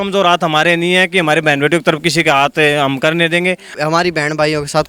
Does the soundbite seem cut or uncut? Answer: cut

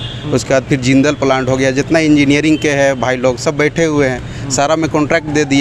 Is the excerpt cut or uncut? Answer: uncut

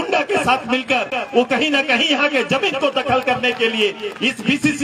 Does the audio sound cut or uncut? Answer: uncut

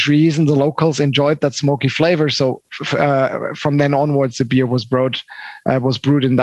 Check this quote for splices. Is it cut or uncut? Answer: uncut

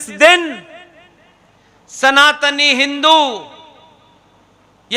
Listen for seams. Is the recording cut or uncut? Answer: uncut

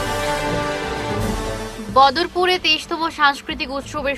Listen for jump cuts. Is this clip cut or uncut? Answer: cut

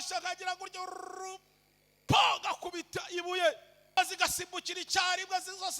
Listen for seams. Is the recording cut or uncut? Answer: cut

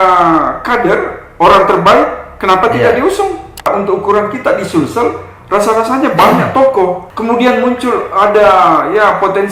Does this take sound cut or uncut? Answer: cut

